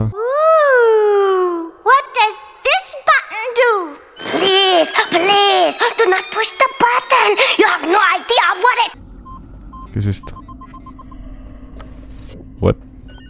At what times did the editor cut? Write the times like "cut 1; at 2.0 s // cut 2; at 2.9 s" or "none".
none

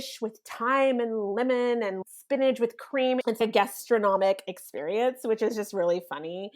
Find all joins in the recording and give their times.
cut 1; at 2.0 s // cut 2; at 3.3 s

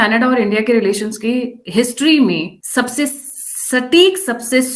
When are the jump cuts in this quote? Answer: cut 1; at 2.6 s

